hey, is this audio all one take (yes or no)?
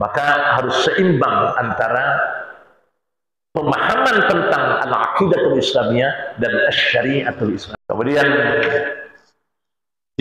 no